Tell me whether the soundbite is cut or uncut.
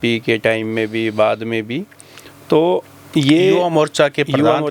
uncut